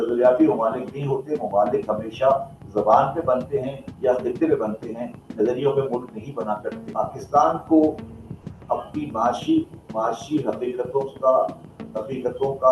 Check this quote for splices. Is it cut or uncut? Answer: cut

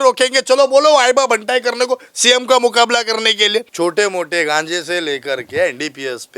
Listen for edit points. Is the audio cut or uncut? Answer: cut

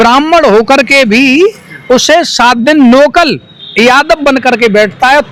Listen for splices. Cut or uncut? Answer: uncut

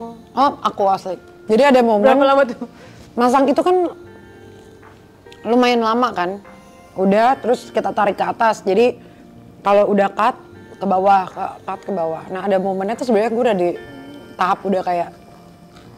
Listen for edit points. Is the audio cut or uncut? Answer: cut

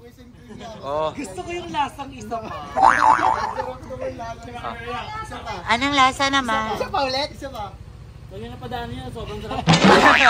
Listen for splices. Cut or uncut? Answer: uncut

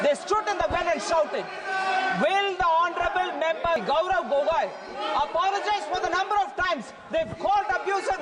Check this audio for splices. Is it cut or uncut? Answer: cut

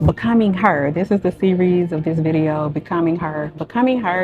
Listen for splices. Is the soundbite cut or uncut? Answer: uncut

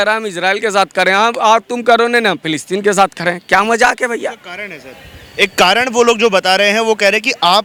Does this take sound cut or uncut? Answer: uncut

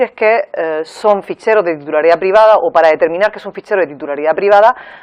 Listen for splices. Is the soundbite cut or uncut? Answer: cut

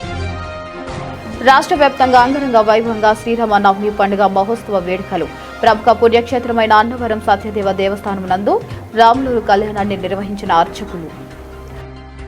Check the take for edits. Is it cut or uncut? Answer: cut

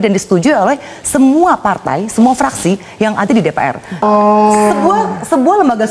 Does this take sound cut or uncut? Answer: cut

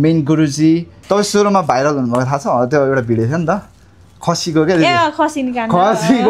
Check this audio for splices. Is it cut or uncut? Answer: cut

